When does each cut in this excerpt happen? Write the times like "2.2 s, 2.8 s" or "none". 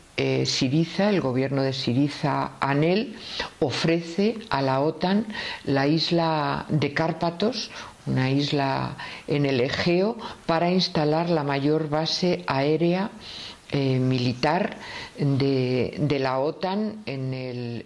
none